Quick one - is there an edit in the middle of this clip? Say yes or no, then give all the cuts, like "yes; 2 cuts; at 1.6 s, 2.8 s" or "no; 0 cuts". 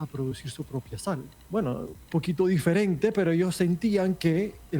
yes; 2 cuts; at 1.3 s, 2.0 s